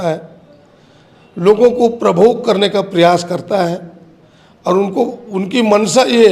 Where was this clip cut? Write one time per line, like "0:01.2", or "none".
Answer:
none

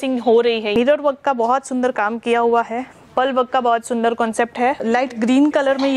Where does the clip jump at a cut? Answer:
0:00.8
0:04.8

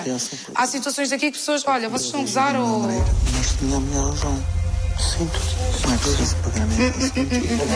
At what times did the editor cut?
0:05.2

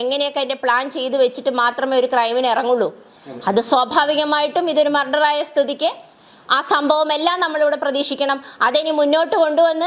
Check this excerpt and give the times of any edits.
none

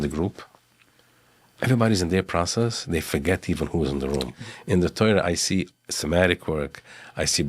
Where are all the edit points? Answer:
0:04.3

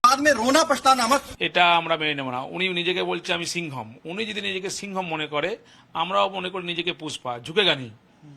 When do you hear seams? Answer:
0:01.3
0:04.0

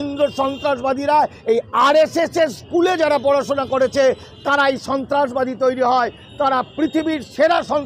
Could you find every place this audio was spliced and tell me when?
none

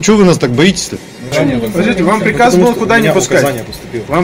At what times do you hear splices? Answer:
0:01.3

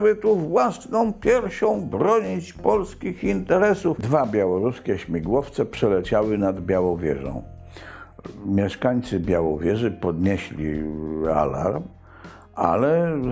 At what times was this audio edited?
0:04.0

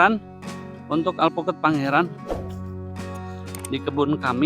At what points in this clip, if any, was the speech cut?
0:02.3
0:03.7

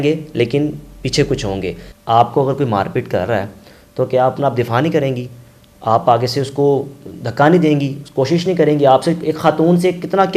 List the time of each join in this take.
0:01.8

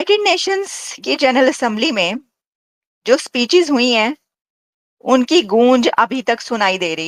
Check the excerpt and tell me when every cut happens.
none

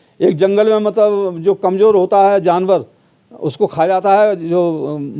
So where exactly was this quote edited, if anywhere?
none

